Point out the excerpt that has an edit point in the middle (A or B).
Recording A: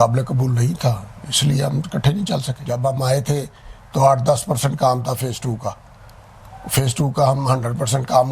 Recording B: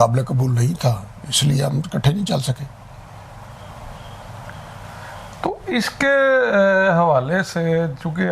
A